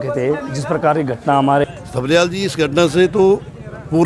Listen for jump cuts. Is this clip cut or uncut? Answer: cut